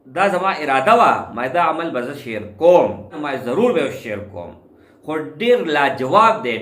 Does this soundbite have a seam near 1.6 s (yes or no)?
no